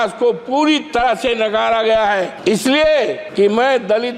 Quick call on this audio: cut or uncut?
cut